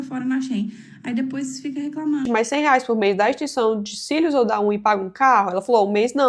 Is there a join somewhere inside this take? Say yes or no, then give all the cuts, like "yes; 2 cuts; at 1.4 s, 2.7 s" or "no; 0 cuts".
yes; 1 cut; at 2.2 s